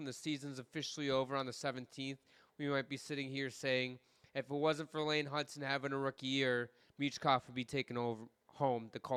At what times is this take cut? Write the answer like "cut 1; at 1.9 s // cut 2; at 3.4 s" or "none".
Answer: none

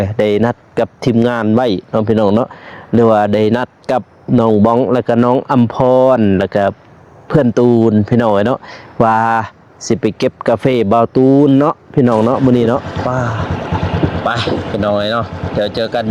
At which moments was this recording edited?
cut 1; at 12.9 s

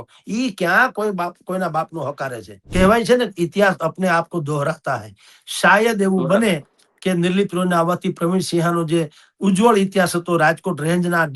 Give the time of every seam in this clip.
cut 1; at 2.6 s

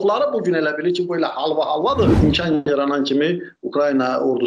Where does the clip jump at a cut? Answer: cut 1; at 2.2 s

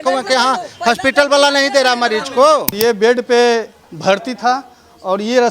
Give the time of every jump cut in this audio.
cut 1; at 2.7 s

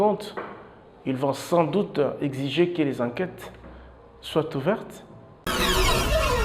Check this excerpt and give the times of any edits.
cut 1; at 5.3 s

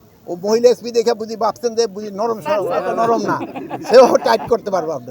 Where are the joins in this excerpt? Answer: none

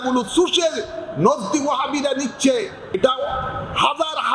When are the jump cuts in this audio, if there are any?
cut 1; at 3.0 s

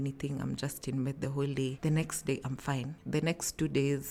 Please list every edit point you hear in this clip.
none

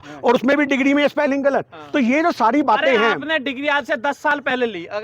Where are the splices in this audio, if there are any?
none

